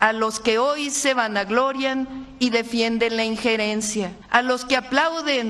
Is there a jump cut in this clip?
yes; 1 cut; at 4.2 s

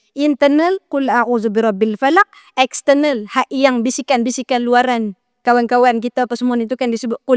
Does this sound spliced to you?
no; 0 cuts

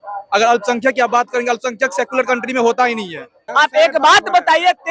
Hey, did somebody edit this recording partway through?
yes; 1 cut; at 3.4 s

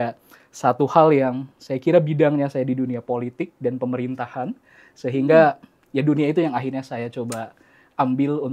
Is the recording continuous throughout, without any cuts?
yes; 0 cuts

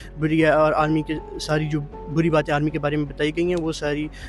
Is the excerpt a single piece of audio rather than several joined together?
yes; 0 cuts

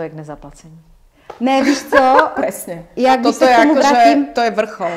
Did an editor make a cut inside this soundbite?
no; 0 cuts

